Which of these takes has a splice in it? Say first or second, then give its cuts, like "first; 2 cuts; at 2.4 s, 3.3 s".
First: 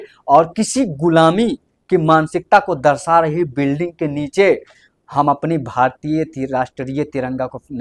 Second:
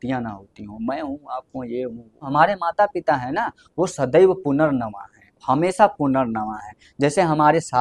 second; 1 cut; at 2.3 s